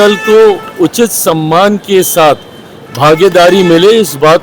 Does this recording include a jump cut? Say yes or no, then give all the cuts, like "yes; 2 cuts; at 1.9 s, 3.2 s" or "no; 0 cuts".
no; 0 cuts